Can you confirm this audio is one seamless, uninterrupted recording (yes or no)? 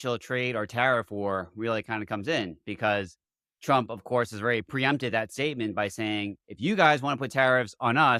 yes